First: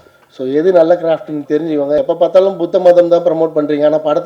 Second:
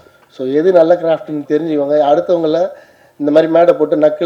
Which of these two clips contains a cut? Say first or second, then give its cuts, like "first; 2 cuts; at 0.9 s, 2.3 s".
first; 1 cut; at 2.0 s